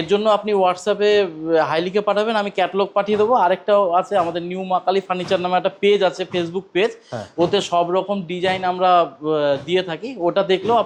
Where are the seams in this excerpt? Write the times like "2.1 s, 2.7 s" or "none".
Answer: none